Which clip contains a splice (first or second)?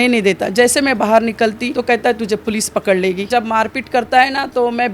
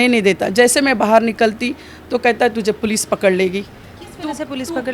first